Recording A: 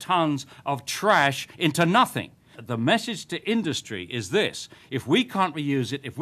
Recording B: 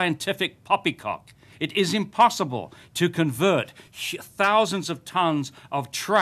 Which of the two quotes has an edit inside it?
A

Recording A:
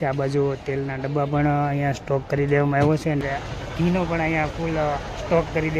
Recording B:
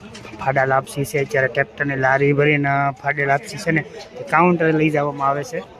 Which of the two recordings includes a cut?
A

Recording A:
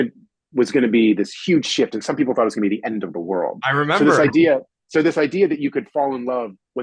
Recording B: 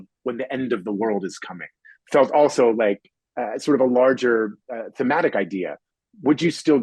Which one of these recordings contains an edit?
A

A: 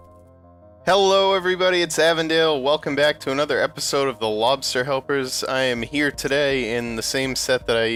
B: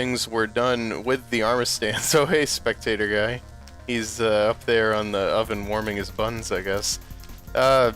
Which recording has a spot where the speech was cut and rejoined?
B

